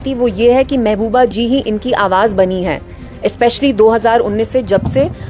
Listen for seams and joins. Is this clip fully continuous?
yes; 0 cuts

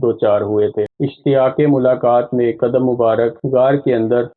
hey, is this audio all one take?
no; 1 cut; at 0.9 s

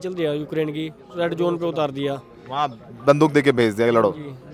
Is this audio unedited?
yes; 0 cuts

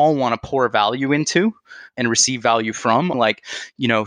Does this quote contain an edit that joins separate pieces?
yes; 2 cuts; at 1.9 s, 3.1 s

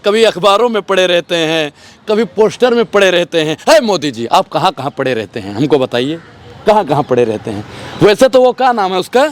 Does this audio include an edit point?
no; 0 cuts

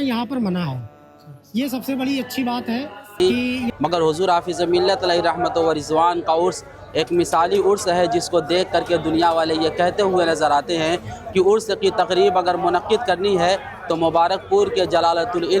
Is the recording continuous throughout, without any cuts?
no; 1 cut; at 3.2 s

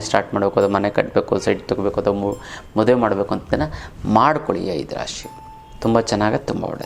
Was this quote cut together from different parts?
no; 0 cuts

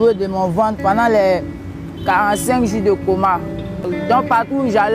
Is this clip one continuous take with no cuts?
no; 1 cut; at 3.8 s

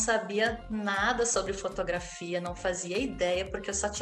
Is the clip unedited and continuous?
yes; 0 cuts

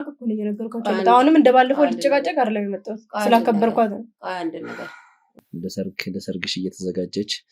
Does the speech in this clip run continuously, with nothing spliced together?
no; 1 cut; at 5.4 s

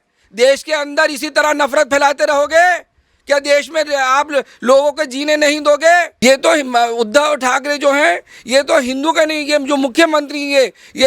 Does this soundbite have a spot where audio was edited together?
yes; 1 cut; at 6.1 s

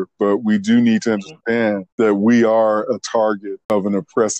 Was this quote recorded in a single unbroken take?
no; 2 cuts; at 1.8 s, 3.7 s

